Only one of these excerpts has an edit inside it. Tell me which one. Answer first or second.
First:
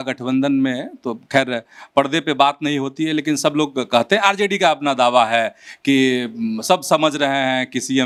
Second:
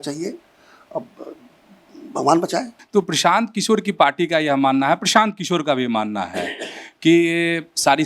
second